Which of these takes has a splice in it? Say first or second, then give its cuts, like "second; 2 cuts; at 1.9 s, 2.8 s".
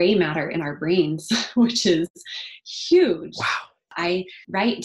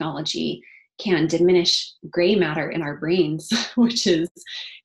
first; 1 cut; at 3.9 s